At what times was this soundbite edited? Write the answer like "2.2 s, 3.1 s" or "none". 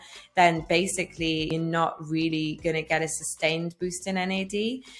1.5 s